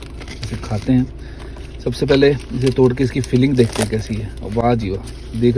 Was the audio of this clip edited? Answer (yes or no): no